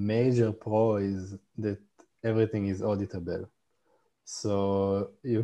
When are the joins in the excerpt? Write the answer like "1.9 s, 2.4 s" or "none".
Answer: none